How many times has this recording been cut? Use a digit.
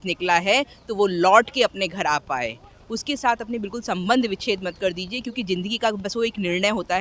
0